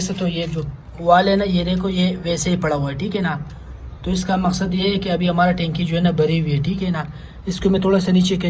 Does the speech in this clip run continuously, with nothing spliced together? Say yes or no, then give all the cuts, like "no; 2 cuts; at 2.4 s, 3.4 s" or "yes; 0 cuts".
yes; 0 cuts